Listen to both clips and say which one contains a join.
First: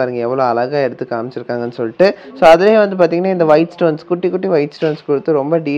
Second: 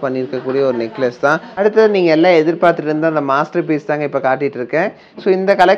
second; 1 cut; at 1.5 s

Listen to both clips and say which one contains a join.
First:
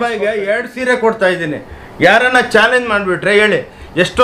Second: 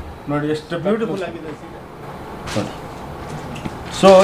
second; 1 cut; at 1.5 s

